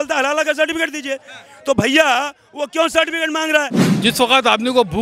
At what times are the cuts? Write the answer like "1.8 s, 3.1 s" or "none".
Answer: 3.8 s